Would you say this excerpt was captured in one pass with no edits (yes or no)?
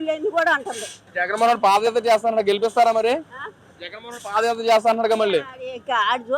no